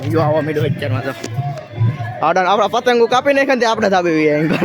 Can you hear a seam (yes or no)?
no